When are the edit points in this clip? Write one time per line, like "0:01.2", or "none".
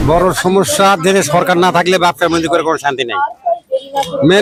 none